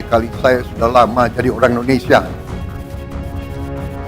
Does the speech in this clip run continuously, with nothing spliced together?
yes; 0 cuts

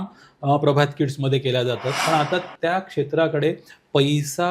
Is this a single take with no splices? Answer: no; 1 cut; at 1.9 s

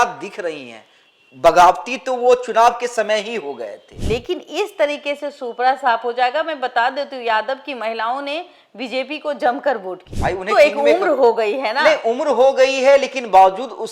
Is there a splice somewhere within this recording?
yes; 2 cuts; at 3.9 s, 10.0 s

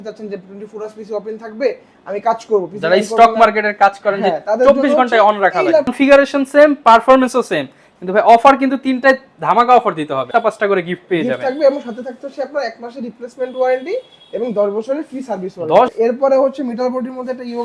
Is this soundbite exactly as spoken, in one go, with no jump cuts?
no; 3 cuts; at 5.9 s, 10.3 s, 15.9 s

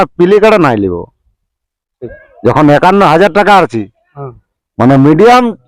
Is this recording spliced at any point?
no; 0 cuts

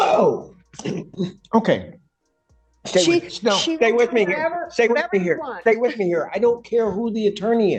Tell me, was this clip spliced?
no; 0 cuts

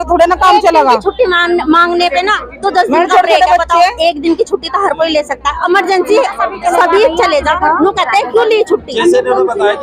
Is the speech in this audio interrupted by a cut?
no; 0 cuts

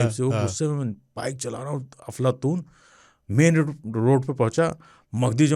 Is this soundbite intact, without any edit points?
yes; 0 cuts

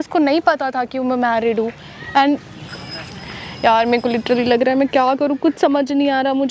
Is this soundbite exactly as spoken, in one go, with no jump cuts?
yes; 0 cuts

